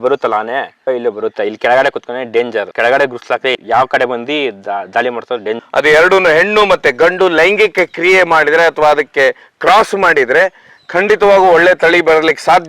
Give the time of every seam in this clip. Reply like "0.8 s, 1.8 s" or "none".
3.5 s, 5.6 s